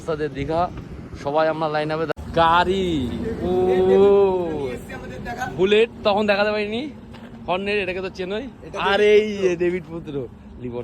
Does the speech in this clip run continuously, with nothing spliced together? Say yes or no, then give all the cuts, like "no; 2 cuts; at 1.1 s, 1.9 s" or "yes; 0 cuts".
no; 1 cut; at 2.1 s